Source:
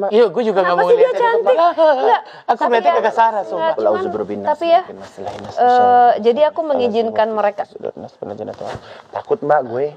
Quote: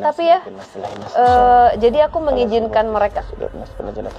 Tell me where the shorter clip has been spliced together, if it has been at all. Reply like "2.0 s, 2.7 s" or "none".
none